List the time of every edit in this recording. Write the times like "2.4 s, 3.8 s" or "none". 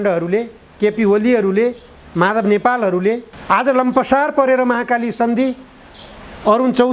3.3 s